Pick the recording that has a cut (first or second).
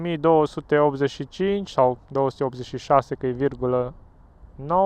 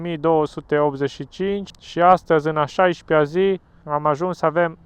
second